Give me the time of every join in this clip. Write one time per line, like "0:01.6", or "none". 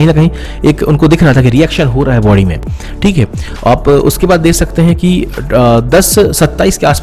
none